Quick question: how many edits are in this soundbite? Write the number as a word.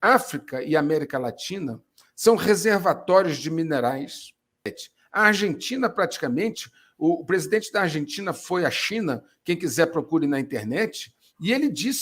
one